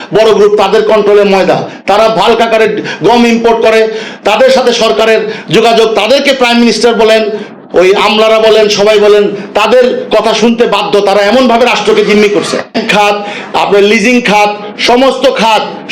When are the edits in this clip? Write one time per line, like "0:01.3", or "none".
0:12.8